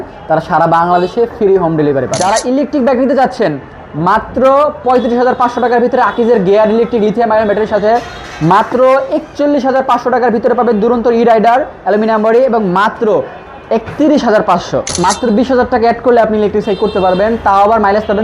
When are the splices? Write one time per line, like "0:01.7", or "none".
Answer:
0:02.1
0:14.9